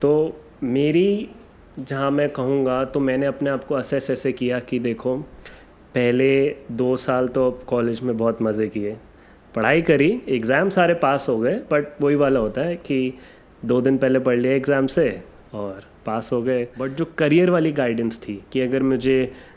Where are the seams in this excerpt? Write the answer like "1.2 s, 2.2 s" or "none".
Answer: 16.8 s